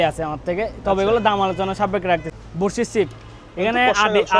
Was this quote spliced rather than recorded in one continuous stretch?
yes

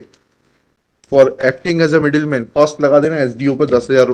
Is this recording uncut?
yes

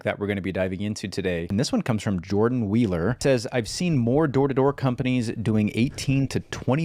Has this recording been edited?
yes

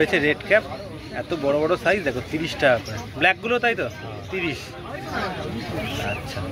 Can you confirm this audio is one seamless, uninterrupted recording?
yes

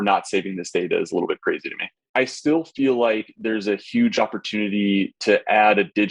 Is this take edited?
yes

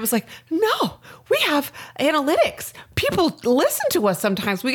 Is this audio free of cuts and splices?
yes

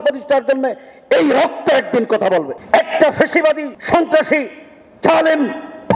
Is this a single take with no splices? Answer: no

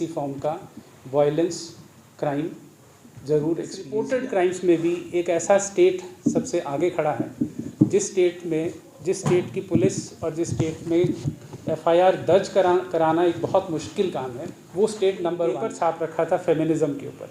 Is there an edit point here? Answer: yes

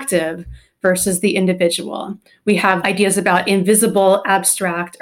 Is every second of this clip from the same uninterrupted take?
no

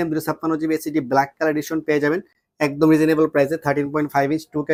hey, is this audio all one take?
yes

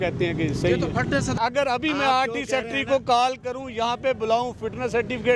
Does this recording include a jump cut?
yes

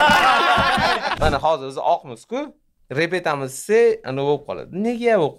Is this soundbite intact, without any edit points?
no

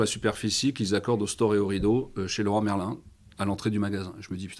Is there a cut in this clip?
no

